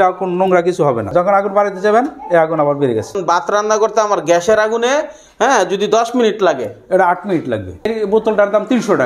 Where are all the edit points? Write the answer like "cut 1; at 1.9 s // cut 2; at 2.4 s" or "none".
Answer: cut 1; at 1.1 s // cut 2; at 3.2 s // cut 3; at 7.9 s